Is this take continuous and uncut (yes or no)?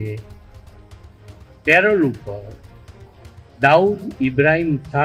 yes